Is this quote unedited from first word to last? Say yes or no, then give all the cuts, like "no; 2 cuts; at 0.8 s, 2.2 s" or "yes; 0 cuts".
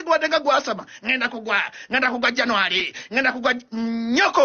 yes; 0 cuts